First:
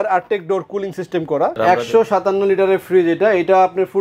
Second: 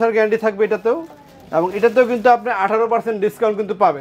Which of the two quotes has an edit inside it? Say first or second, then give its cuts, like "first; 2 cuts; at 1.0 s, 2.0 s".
first; 1 cut; at 1.6 s